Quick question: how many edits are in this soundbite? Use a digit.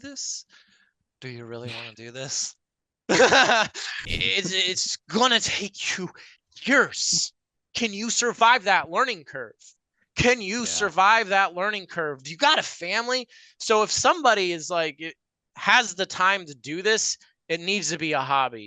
1